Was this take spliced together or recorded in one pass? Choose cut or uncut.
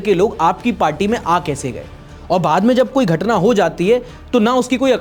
uncut